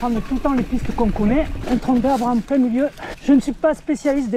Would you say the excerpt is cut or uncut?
cut